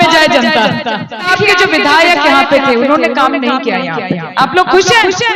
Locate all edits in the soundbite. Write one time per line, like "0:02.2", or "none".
0:01.3